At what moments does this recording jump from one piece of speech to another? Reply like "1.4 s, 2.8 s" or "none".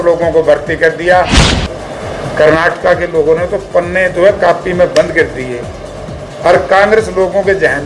1.5 s